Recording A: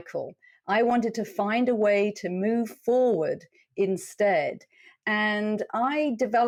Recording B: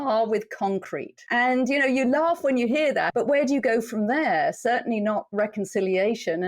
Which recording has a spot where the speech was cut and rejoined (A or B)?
B